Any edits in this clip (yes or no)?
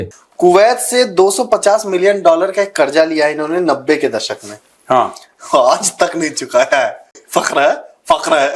yes